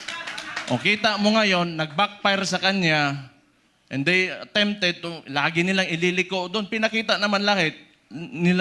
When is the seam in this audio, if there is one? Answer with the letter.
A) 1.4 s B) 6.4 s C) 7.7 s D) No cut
D